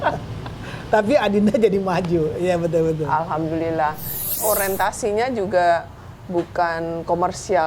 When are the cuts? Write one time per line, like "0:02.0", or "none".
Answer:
0:04.3